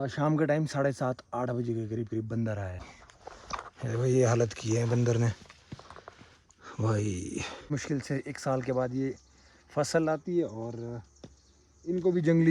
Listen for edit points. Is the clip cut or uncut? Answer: cut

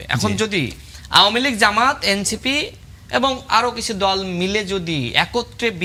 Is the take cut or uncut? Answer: uncut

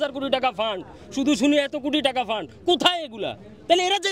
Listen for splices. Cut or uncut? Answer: uncut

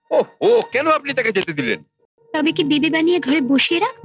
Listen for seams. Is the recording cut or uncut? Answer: uncut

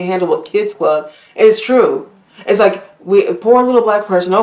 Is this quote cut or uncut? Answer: uncut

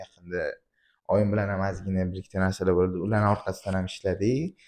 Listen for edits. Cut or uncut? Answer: uncut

